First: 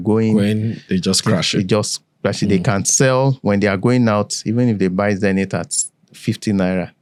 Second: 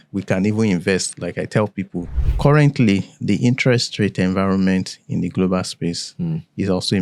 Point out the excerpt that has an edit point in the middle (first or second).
second